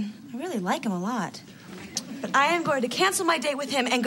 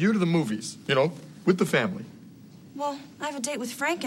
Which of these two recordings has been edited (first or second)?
first